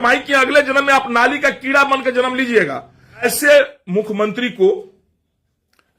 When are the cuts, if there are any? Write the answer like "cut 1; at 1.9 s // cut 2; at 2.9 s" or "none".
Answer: cut 1; at 3.2 s